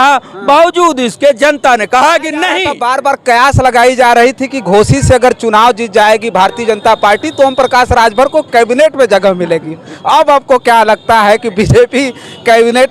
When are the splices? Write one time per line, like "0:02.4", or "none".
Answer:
0:02.8